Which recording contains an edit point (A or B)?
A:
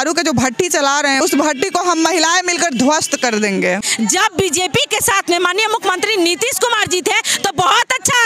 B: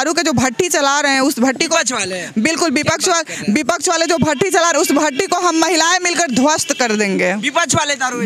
A